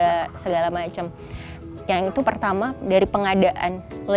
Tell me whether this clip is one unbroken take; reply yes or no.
yes